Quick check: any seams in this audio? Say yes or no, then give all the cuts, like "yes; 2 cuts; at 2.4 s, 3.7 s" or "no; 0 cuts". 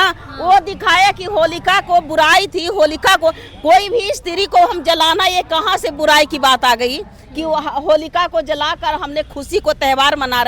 no; 0 cuts